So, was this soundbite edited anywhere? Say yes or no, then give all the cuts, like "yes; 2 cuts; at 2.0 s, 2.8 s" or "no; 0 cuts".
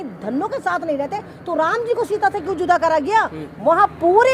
no; 0 cuts